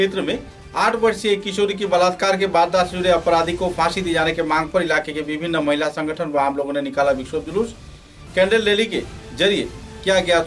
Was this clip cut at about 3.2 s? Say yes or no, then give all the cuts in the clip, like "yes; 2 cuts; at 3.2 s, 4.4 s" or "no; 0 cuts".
no; 0 cuts